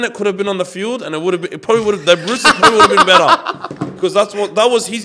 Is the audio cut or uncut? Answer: uncut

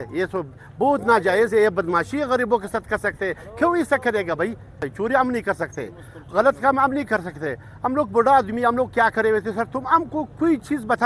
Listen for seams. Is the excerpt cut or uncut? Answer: cut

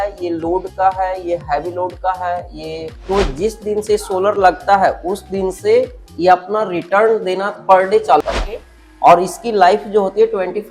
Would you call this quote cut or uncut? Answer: cut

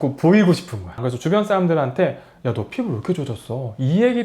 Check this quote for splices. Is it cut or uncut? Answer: cut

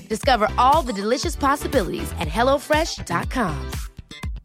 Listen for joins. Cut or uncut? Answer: uncut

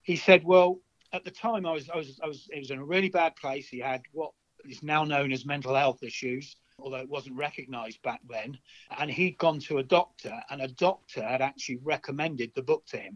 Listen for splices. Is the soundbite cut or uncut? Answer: cut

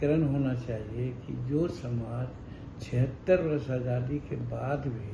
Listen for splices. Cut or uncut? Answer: uncut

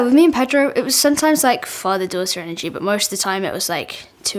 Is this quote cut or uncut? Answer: uncut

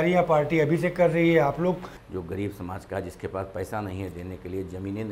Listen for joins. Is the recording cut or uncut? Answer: cut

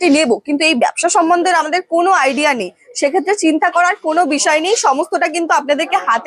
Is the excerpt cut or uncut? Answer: uncut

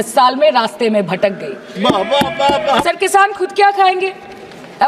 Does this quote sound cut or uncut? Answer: uncut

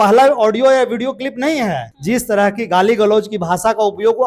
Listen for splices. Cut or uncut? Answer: cut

